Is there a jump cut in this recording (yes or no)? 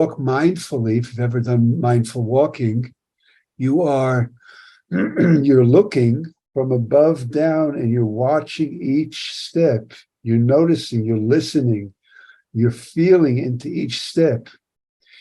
yes